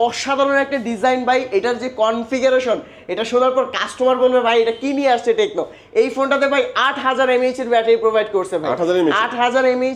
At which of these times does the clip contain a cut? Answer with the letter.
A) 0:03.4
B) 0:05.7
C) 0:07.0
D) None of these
D